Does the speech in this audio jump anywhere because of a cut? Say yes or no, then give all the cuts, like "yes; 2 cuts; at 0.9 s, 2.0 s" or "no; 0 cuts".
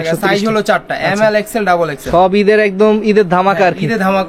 no; 0 cuts